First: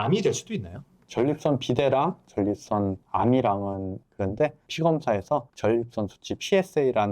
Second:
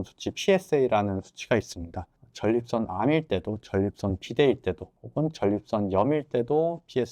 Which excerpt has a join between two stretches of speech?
first; 2 cuts; at 0.9 s, 3.9 s

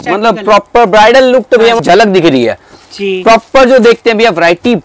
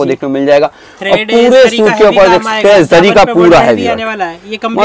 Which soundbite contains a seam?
first; 1 cut; at 1.8 s

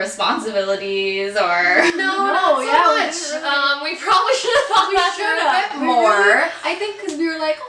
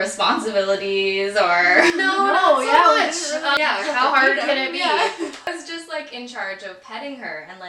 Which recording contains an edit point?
second; 2 cuts; at 3.6 s, 5.5 s

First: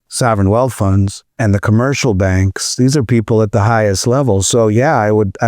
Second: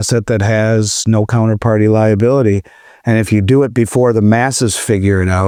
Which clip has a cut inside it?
first; 1 cut; at 1.3 s

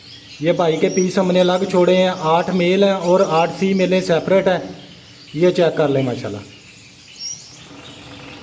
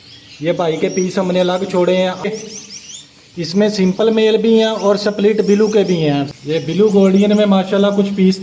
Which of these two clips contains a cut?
second; 2 cuts; at 2.2 s, 6.3 s

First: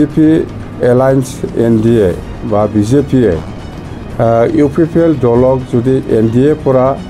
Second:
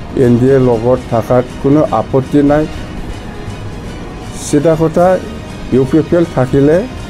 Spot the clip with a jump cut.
second; 1 cut; at 2.9 s

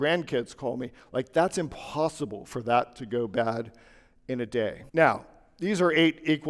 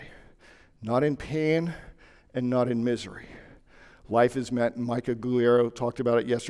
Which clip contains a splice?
first; 1 cut; at 4.8 s

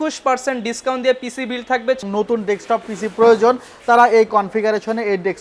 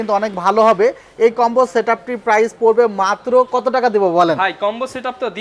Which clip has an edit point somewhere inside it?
first; 1 cut; at 2.0 s

